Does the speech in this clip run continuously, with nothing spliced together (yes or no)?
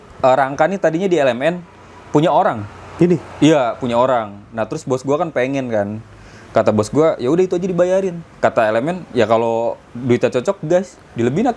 yes